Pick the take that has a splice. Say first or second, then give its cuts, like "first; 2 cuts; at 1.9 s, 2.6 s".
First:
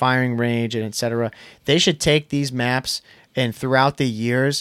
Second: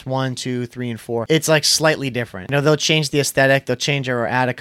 second; 2 cuts; at 1.2 s, 2.5 s